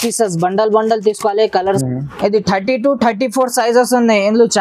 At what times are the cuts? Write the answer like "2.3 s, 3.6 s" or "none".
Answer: 1.8 s